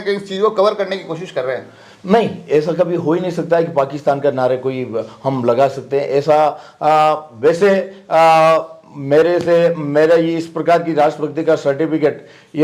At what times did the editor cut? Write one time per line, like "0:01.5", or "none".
none